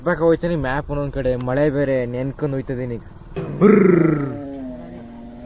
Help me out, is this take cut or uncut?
cut